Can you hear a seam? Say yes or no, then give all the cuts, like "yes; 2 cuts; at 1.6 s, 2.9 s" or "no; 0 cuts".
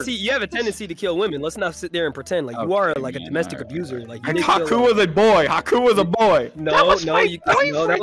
no; 0 cuts